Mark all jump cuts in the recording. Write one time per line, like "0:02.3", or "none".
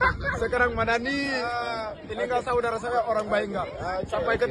none

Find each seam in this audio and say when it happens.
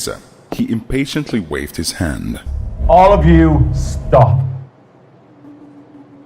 0:02.5

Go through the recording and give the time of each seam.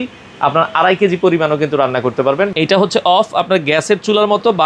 0:02.5

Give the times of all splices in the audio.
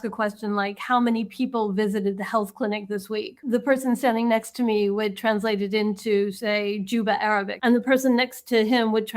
0:03.3
0:07.5

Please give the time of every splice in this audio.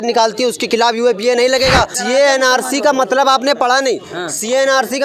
0:02.0

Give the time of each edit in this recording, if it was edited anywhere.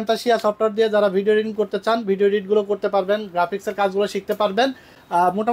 none

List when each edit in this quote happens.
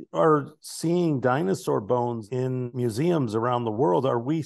0:02.5

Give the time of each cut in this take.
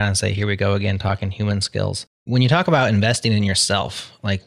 0:02.1

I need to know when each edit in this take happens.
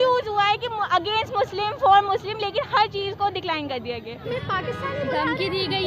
0:04.2

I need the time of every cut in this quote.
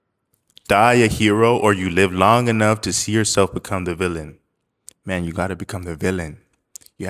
none

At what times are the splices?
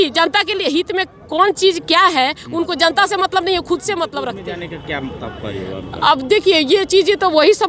0:04.5

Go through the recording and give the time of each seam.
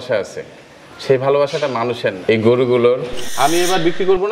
0:02.2
0:03.2

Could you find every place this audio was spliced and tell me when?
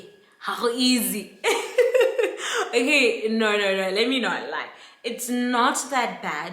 none

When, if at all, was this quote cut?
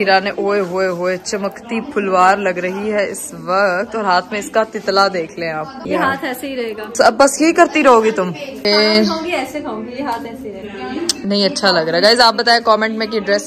none

